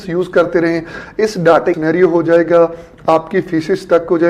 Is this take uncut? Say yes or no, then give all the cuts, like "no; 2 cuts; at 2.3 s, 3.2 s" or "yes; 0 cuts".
no; 1 cut; at 1.8 s